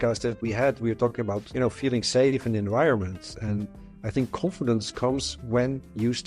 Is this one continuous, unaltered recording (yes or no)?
no